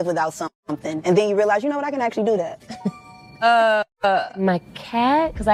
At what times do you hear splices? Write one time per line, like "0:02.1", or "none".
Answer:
none